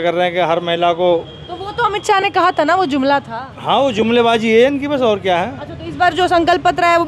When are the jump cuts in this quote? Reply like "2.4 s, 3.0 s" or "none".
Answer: none